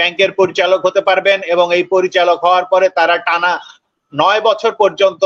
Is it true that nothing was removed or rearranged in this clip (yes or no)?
yes